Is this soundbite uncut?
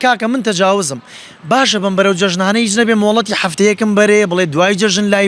yes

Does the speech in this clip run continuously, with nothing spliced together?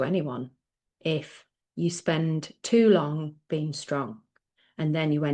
yes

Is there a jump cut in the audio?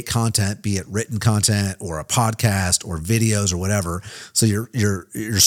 no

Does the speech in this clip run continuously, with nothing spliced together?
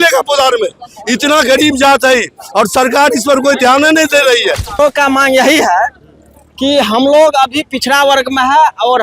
no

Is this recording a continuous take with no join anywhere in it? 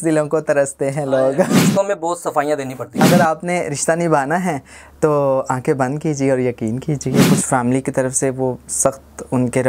no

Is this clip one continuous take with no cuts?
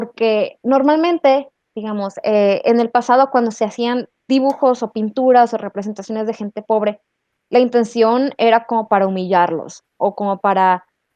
yes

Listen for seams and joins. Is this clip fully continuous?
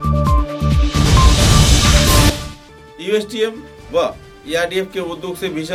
yes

